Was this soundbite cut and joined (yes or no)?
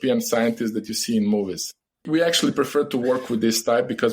yes